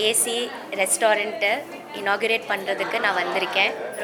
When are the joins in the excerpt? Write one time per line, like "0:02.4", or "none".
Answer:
none